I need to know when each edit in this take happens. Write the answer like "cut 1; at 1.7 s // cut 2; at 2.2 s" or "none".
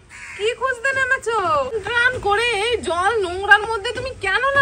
cut 1; at 1.7 s